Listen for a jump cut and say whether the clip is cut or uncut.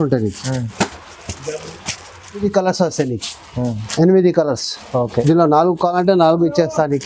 cut